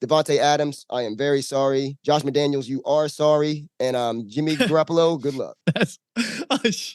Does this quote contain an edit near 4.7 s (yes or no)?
no